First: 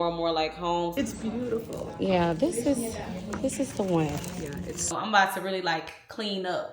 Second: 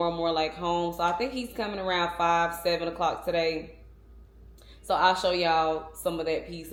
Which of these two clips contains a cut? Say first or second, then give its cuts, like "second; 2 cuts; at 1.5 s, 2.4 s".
first; 2 cuts; at 0.9 s, 4.9 s